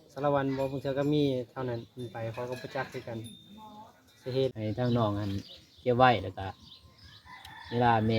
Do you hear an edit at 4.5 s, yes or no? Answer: yes